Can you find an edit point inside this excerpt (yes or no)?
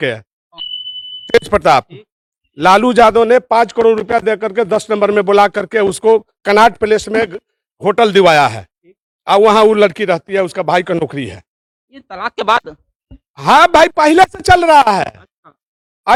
no